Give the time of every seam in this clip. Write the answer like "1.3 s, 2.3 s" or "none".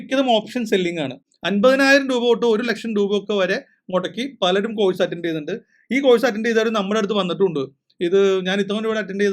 1.2 s